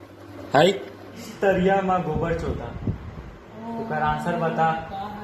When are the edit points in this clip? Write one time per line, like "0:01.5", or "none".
0:01.3